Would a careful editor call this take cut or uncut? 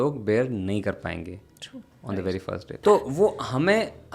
cut